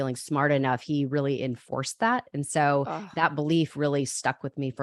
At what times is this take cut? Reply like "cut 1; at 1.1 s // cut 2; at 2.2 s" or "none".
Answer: none